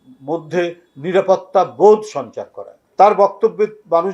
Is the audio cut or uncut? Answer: uncut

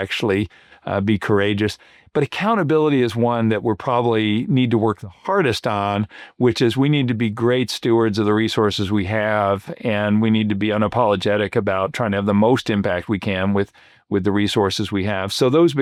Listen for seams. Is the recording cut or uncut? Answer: uncut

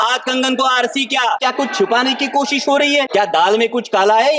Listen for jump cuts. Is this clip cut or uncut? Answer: cut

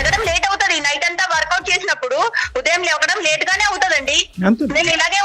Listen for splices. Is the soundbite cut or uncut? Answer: uncut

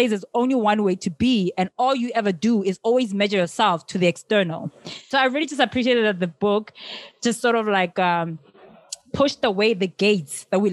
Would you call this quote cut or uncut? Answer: cut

